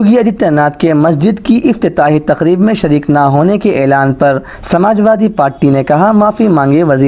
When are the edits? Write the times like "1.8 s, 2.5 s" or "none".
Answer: none

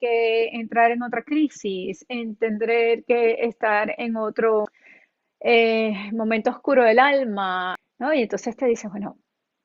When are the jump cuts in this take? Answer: 4.8 s, 7.8 s

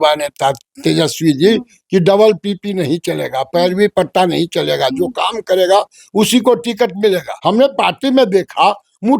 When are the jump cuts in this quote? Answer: 7.3 s

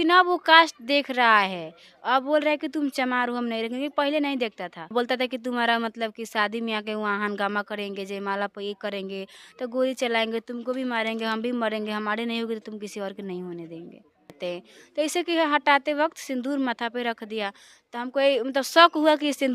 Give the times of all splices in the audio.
4.9 s, 14.4 s

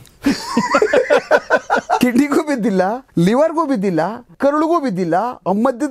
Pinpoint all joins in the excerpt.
2.0 s, 3.0 s, 4.3 s

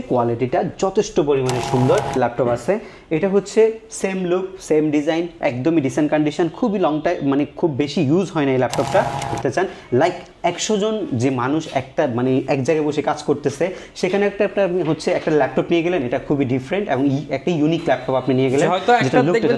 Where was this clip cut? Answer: 2.1 s, 9.3 s

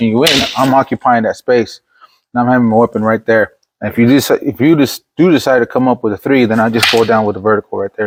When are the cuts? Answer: none

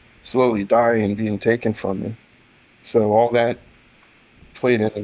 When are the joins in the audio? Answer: none

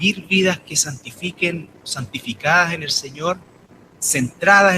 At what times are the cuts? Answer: 3.6 s

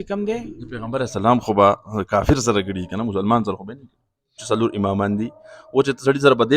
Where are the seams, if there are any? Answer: 4.4 s

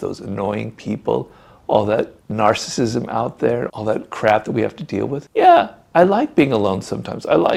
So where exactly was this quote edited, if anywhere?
none

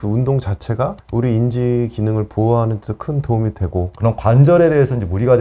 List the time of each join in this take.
3.9 s

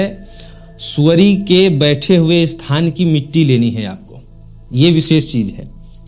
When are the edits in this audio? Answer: none

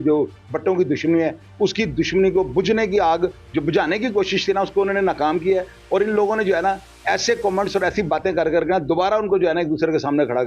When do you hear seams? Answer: none

